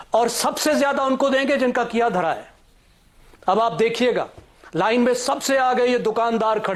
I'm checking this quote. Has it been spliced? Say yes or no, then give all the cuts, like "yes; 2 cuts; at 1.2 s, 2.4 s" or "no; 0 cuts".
no; 0 cuts